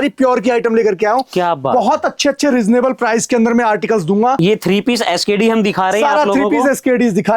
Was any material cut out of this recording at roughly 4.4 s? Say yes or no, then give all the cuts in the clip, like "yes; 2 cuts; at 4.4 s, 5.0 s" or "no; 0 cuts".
yes; 1 cut; at 4.4 s